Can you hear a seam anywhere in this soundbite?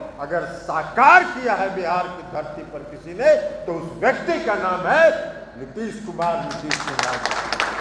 no; 0 cuts

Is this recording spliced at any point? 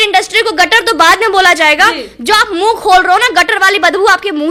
no; 0 cuts

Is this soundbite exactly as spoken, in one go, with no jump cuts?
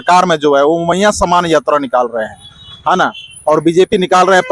yes; 0 cuts

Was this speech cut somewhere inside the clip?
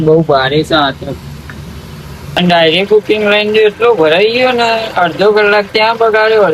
yes; 1 cut; at 2.3 s

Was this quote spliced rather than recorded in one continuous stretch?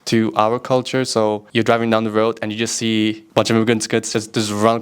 yes; 2 cuts; at 1.4 s, 3.2 s

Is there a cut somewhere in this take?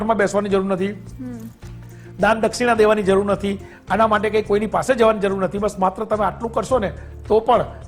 no; 0 cuts

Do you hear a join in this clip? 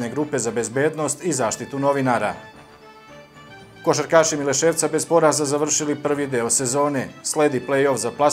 yes; 2 cuts; at 2.4 s, 3.7 s

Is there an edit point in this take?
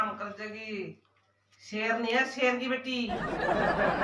no; 0 cuts

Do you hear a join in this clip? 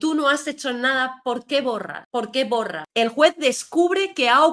yes; 1 cut; at 2.8 s

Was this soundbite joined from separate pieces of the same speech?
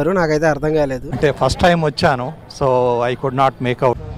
no; 0 cuts

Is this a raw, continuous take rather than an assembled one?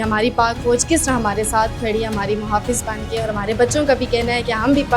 yes; 0 cuts

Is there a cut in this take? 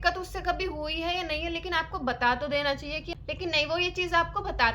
yes; 1 cut; at 3.1 s

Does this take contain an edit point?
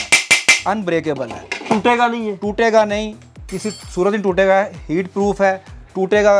no; 0 cuts

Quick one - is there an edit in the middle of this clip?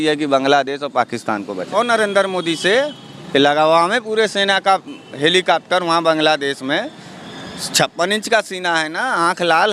yes; 1 cut; at 1.8 s

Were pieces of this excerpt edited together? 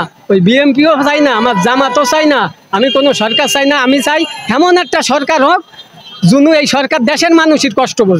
no; 0 cuts

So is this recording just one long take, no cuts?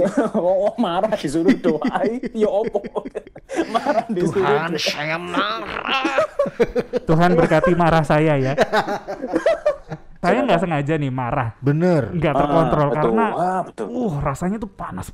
no; 1 cut; at 10.2 s

